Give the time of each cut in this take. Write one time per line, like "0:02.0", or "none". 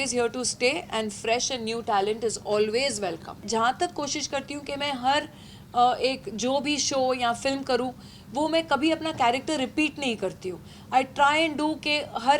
0:03.4